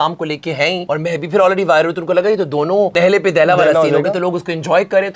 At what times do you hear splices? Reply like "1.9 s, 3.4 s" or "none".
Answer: 0.8 s, 2.9 s